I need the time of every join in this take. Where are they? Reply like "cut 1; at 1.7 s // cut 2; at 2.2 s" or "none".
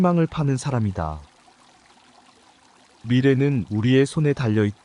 cut 1; at 1.3 s // cut 2; at 3.0 s